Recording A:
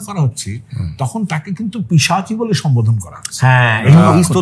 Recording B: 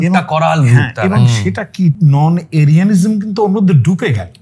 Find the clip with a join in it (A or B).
B